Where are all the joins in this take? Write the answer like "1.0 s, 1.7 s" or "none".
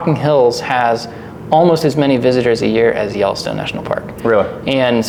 none